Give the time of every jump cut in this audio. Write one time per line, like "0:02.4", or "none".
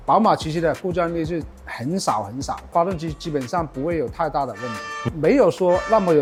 none